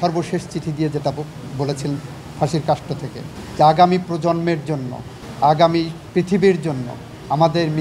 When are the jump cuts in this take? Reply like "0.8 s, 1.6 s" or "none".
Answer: none